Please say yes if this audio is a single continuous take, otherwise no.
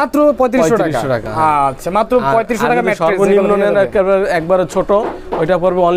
yes